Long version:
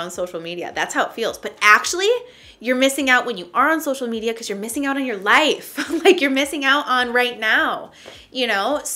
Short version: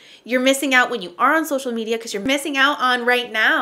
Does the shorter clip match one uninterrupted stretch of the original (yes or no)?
no